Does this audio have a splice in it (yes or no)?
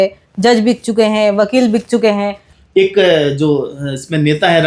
yes